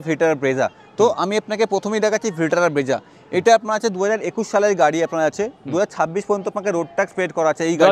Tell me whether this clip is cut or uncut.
uncut